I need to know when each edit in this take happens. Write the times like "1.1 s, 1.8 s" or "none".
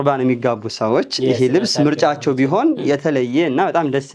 none